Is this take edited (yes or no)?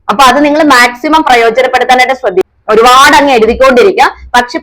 yes